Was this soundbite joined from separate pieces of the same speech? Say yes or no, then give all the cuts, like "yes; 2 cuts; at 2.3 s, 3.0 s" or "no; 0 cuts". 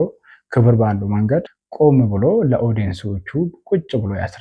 yes; 1 cut; at 1.6 s